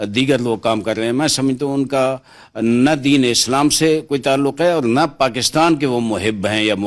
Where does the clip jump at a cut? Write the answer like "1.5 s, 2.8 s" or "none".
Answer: none